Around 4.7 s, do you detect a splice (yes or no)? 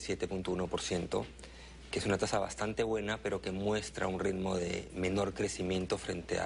no